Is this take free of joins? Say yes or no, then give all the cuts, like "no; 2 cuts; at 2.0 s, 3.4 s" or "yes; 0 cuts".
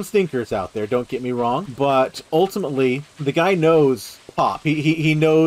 no; 3 cuts; at 1.7 s, 3.1 s, 4.2 s